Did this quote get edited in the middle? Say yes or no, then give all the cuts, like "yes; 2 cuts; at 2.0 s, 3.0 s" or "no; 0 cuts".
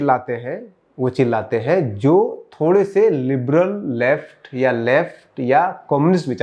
no; 0 cuts